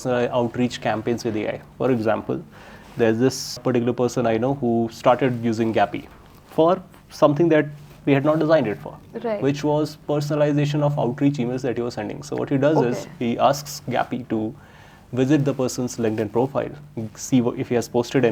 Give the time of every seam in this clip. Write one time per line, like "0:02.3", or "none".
none